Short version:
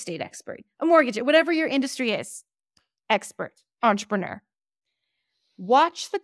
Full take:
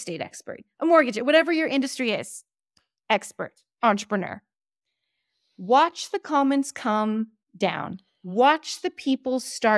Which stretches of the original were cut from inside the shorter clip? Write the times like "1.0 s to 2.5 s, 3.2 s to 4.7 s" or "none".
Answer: none